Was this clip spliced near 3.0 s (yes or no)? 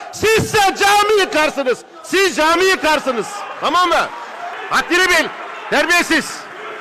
no